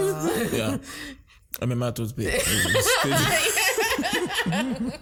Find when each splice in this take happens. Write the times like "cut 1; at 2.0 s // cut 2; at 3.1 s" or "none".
none